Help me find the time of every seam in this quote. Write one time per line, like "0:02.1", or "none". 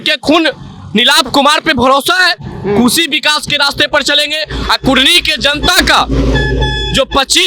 none